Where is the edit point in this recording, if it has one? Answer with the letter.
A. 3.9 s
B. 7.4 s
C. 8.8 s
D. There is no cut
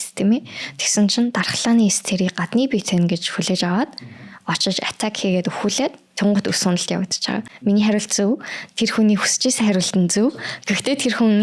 B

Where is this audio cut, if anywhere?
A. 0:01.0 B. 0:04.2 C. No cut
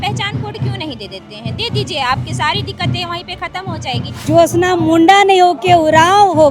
B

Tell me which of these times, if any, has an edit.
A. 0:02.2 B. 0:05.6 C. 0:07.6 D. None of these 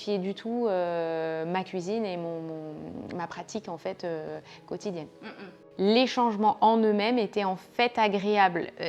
B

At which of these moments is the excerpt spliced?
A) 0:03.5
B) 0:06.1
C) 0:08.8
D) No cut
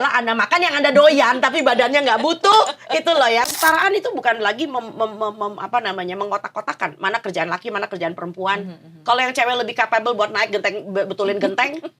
A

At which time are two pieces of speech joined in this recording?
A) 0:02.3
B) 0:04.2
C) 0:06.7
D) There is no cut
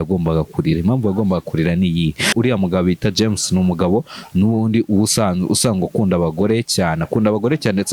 A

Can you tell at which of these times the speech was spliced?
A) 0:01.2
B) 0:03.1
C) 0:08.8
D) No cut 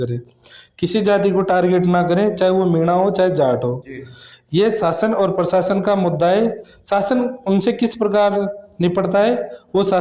D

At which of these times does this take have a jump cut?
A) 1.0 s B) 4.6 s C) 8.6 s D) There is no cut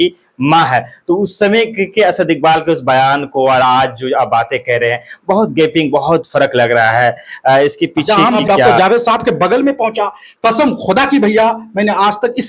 C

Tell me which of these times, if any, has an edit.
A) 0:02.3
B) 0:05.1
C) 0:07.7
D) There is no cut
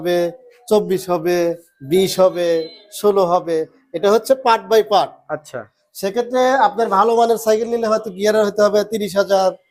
D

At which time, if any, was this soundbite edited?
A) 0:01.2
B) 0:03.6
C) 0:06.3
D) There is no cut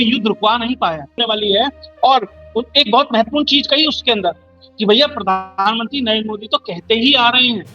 A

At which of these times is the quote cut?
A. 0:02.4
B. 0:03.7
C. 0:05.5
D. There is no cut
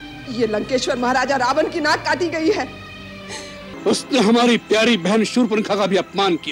B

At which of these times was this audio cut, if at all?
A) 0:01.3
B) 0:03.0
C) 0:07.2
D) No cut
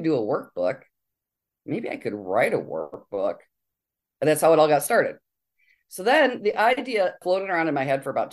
C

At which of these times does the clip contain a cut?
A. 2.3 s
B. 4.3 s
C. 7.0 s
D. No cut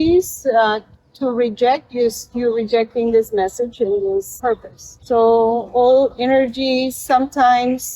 B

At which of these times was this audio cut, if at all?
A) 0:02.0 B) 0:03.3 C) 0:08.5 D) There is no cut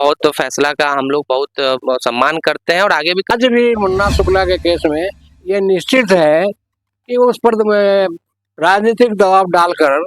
B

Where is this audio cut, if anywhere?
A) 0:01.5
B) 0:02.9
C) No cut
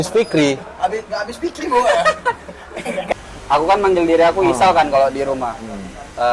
B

